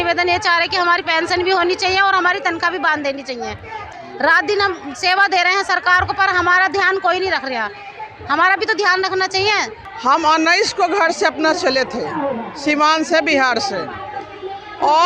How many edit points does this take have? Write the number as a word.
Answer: two